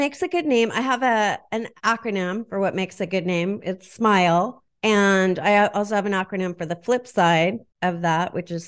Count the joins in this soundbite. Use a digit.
2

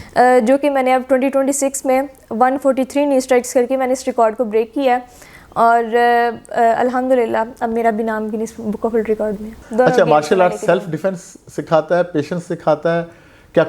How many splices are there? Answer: 1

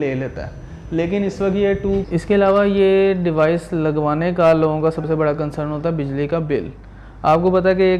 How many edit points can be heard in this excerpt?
1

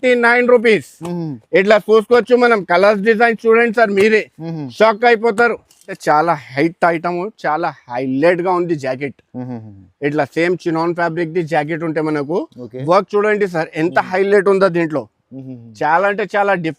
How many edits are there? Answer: 1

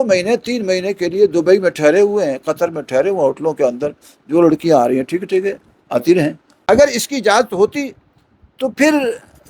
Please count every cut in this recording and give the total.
1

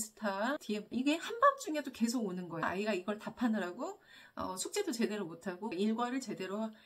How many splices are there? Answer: 2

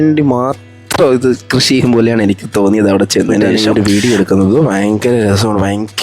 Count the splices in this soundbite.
1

